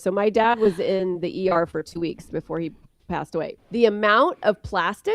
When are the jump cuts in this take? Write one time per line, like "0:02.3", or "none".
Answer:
0:03.6